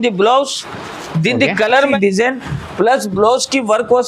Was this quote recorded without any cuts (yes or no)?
no